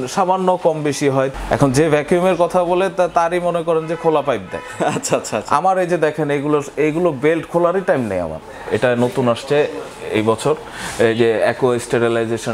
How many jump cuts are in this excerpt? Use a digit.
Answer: 2